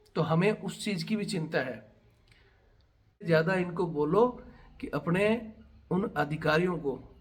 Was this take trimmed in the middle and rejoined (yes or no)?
yes